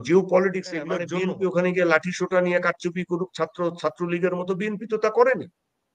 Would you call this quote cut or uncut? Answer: cut